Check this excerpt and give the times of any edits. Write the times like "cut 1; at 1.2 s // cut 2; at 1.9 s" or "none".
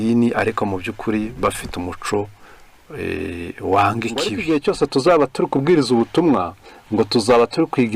cut 1; at 4.4 s